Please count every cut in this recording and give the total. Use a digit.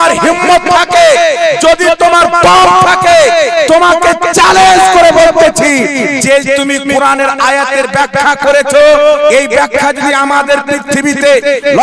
0